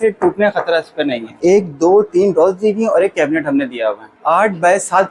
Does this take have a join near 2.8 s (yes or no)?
no